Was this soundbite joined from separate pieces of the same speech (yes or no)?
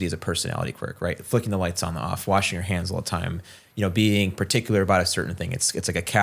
no